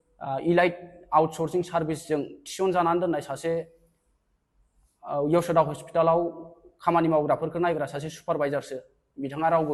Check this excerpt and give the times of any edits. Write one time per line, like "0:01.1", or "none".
none